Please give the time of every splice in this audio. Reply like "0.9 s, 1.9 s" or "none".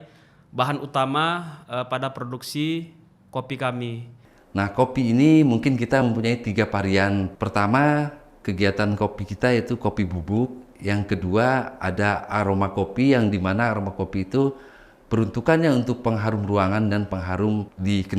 4.1 s